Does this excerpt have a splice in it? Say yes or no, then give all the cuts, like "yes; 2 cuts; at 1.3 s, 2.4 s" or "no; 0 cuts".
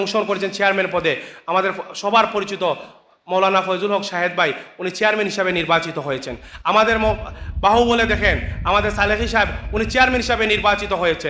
no; 0 cuts